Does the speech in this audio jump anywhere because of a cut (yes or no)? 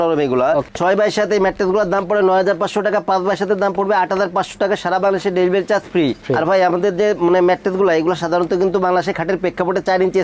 no